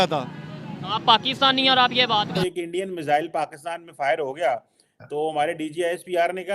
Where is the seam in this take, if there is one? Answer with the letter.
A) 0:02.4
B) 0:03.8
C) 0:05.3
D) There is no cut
A